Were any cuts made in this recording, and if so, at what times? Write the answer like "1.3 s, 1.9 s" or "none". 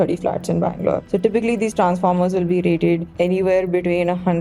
1.0 s, 3.1 s